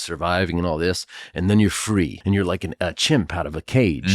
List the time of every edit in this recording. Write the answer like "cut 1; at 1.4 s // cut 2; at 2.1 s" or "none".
cut 1; at 2.5 s